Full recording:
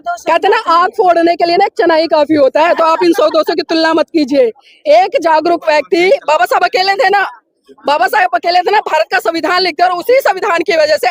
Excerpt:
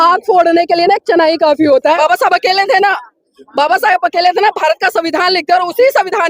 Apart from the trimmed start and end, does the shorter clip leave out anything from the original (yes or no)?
yes